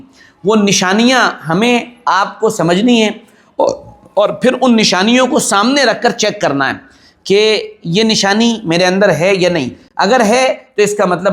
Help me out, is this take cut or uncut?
uncut